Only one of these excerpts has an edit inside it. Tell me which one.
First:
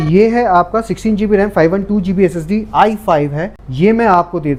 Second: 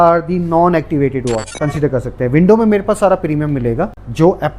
second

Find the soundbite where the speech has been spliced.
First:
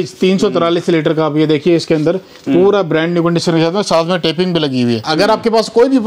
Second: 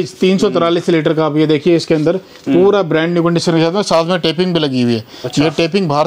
first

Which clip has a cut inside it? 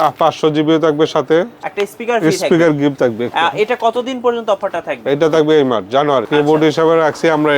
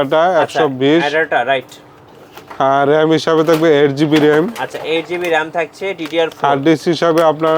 first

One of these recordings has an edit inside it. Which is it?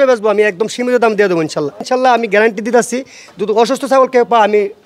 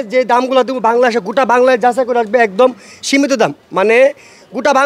first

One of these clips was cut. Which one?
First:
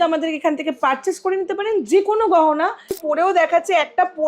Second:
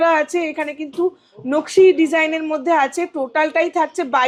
first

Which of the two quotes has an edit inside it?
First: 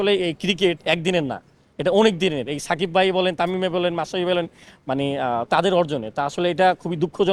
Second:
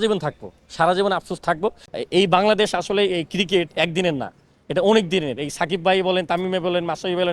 second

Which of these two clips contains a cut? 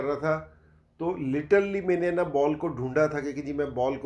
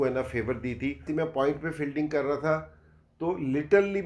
second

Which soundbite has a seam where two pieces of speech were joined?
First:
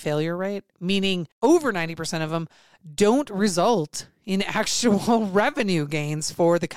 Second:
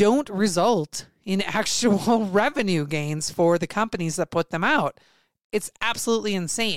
first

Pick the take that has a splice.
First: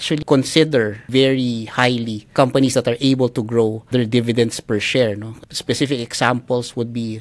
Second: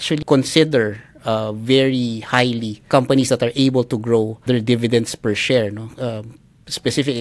first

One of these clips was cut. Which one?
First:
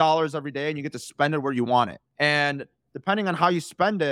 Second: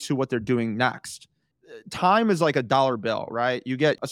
second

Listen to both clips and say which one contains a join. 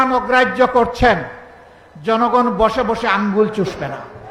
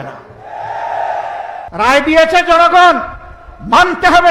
second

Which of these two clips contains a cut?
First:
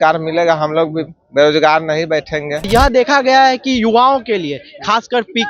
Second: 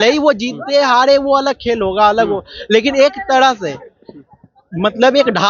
first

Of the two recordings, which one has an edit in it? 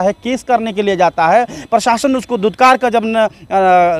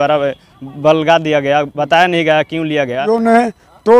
second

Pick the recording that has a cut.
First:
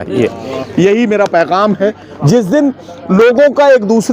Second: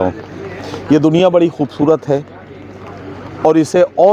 first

